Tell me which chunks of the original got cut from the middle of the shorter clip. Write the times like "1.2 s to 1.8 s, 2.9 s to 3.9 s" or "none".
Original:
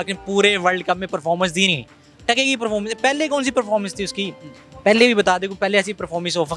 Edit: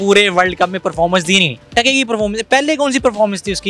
1.9 s to 2.1 s